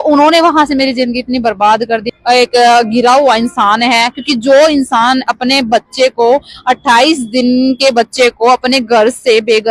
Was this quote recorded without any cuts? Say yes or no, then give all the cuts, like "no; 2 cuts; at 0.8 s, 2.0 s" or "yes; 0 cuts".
no; 1 cut; at 2.1 s